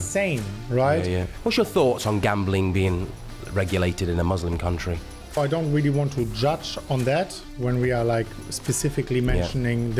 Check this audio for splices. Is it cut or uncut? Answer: cut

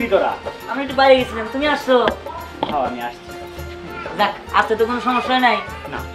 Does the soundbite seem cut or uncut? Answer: uncut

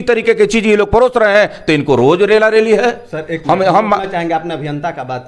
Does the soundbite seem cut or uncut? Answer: uncut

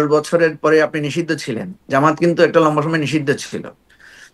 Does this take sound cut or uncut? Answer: uncut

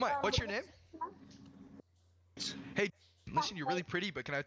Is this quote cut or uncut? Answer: uncut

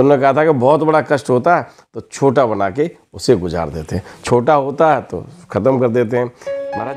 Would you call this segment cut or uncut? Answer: uncut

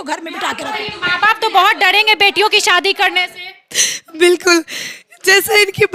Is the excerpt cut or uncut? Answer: uncut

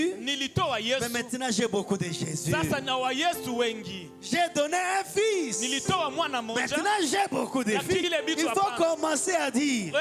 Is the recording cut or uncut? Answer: cut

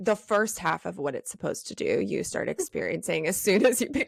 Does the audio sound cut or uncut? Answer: uncut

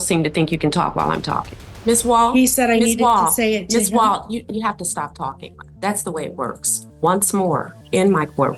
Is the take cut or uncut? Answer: cut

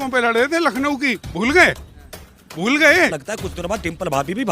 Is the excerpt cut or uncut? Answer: cut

